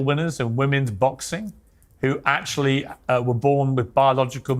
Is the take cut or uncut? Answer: uncut